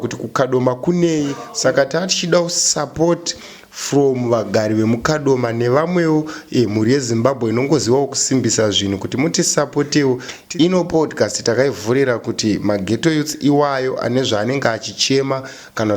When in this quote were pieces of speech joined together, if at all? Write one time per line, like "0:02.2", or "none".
0:01.4
0:10.4